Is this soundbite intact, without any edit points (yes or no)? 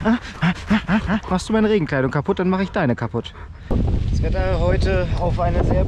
no